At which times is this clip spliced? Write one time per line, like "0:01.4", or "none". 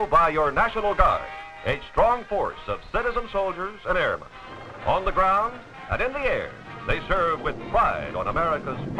0:06.7